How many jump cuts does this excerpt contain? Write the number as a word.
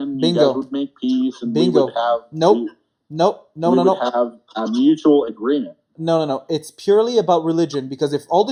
zero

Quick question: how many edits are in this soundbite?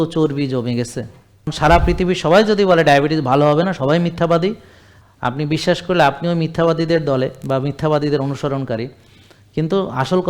one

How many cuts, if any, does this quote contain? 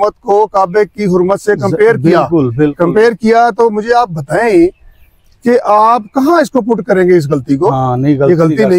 zero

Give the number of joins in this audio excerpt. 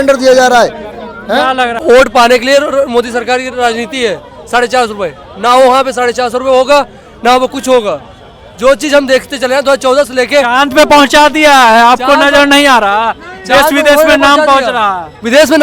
one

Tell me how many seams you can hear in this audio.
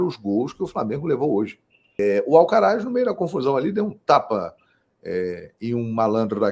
one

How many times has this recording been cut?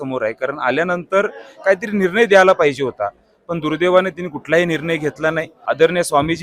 one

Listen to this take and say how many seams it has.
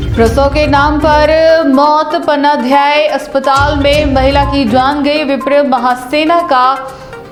zero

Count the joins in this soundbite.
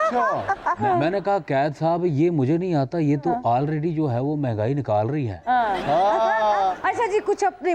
one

